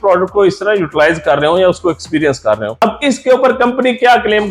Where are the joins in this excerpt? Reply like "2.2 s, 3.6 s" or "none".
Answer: 2.8 s

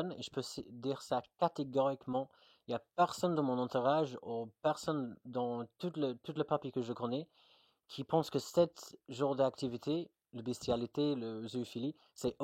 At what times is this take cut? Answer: none

